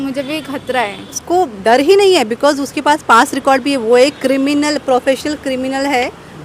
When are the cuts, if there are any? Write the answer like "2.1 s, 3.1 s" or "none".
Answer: 1.2 s

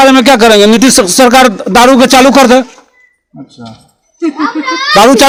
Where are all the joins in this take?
none

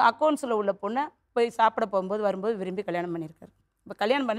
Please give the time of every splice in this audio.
none

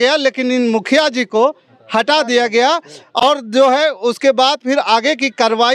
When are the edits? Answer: none

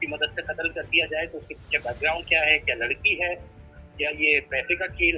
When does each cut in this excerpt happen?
none

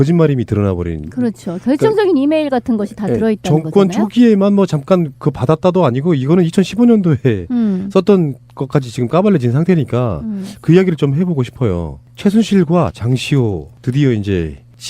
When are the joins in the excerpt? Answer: none

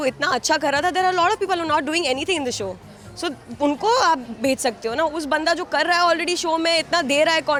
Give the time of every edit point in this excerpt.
none

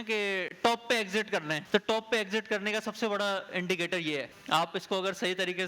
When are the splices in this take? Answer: 1.6 s, 4.4 s

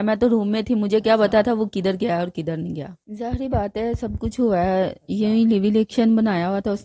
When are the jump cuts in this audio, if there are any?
3.0 s

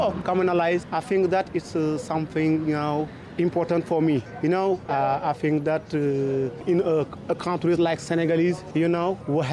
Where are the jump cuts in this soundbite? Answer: none

